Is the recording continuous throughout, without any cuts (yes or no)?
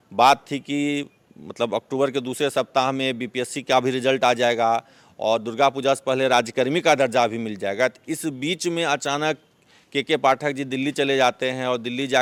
yes